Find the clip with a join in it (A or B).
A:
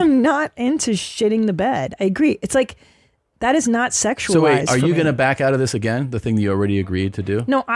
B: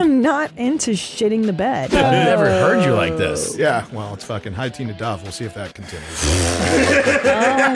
B